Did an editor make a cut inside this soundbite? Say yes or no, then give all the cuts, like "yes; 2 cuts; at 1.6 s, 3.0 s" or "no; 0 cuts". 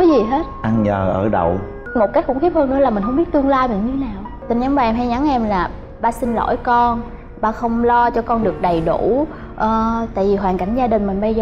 yes; 2 cuts; at 1.8 s, 4.3 s